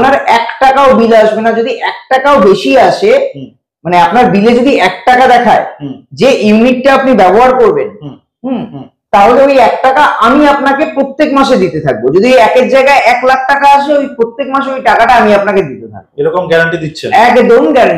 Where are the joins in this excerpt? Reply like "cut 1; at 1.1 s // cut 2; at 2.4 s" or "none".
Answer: none